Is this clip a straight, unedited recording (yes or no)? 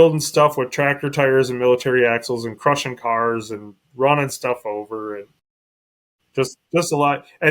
yes